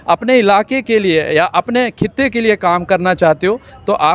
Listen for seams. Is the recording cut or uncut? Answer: uncut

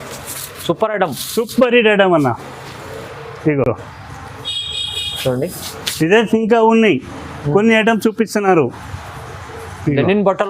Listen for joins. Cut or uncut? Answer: uncut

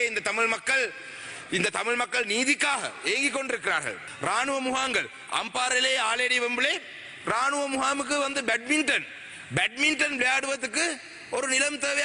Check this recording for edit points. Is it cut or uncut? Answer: cut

